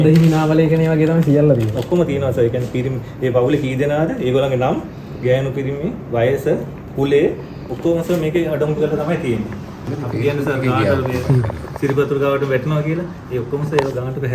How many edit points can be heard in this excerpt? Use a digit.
1